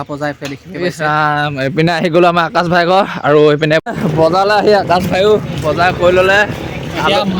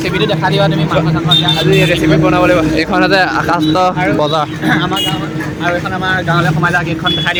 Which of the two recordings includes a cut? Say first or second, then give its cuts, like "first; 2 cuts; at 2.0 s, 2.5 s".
first; 1 cut; at 3.9 s